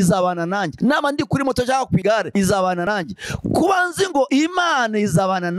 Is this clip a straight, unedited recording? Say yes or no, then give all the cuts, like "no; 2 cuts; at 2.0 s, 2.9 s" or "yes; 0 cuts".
yes; 0 cuts